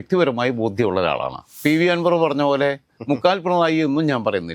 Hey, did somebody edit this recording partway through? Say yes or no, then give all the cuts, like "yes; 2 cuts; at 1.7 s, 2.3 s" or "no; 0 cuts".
yes; 1 cut; at 1.6 s